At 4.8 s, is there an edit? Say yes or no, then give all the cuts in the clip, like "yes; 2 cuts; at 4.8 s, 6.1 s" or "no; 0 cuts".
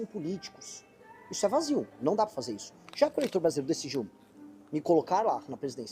no; 1 cut; at 2.7 s